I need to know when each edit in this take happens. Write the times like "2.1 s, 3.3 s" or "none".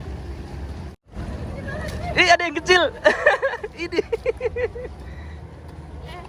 1.1 s

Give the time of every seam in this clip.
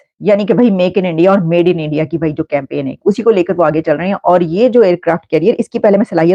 none

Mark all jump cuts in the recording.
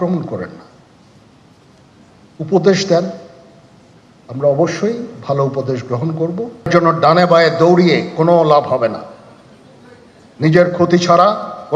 6.7 s

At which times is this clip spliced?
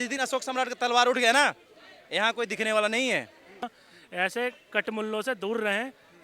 3.6 s

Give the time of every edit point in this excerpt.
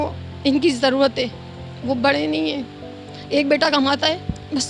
none

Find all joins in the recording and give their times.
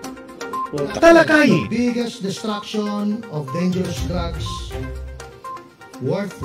none

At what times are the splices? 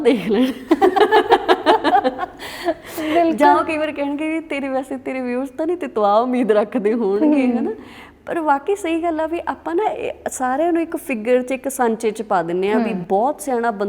none

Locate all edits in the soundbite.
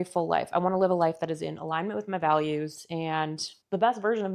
none

